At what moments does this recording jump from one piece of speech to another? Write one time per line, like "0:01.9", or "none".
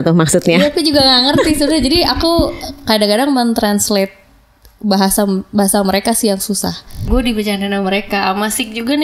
0:07.0